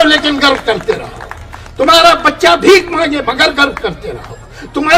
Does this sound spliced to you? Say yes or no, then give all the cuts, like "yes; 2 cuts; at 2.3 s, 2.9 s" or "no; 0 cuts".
no; 0 cuts